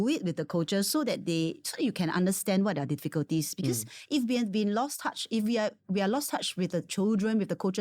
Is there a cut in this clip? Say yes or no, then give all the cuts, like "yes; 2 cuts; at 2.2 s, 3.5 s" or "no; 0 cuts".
no; 0 cuts